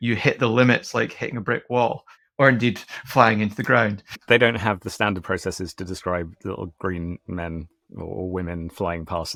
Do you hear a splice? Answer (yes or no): no